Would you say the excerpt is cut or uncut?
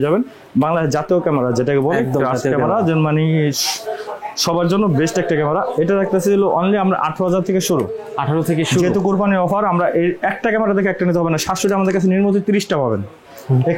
uncut